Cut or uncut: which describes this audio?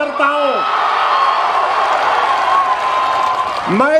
uncut